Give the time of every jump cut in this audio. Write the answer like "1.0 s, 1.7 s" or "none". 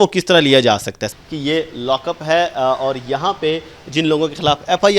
1.0 s